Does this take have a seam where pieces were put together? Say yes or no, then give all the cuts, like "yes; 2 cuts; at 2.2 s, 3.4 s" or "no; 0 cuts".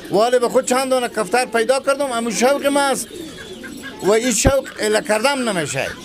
no; 0 cuts